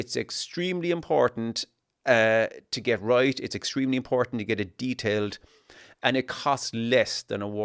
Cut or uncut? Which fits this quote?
uncut